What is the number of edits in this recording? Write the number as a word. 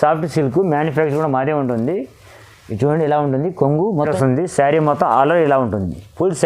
one